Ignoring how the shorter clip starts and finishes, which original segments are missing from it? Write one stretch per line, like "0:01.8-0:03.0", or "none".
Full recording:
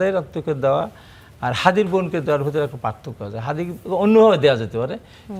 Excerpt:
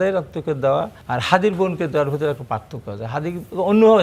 0:01.0-0:01.3